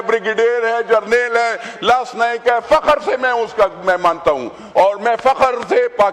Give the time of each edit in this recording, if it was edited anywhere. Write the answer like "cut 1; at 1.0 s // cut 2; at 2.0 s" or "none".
none